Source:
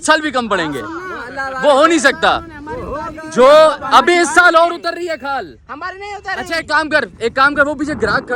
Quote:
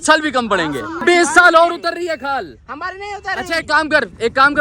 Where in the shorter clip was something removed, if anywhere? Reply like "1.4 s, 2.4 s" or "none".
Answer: 1.0 s